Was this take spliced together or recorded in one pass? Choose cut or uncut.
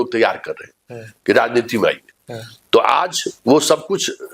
uncut